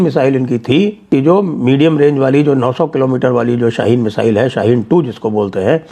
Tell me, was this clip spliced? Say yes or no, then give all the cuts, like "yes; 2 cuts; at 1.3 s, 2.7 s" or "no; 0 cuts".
yes; 1 cut; at 1.0 s